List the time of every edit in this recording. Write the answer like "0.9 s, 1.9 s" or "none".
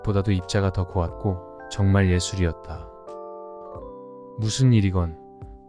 2.5 s, 4.4 s